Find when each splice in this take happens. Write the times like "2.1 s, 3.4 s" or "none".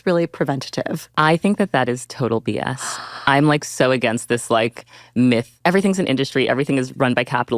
1.0 s, 5.5 s